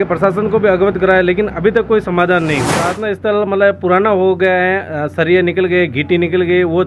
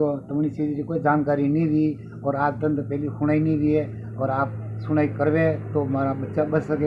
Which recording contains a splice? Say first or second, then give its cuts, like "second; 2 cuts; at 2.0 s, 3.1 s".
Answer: first; 1 cut; at 2.8 s